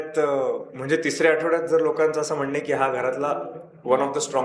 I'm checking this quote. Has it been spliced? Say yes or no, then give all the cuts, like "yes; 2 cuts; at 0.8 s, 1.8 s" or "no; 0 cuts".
no; 0 cuts